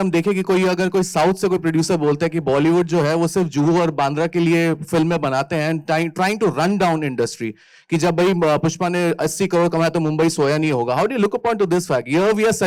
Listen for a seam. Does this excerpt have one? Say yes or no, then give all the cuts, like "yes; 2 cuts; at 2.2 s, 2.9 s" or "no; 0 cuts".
no; 0 cuts